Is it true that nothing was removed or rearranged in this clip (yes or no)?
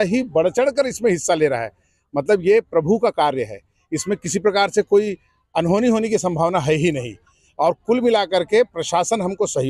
yes